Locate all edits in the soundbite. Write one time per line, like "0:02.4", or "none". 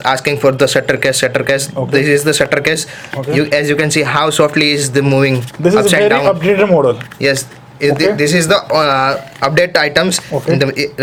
none